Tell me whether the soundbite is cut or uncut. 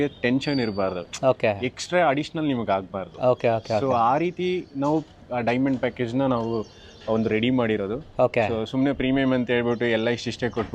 uncut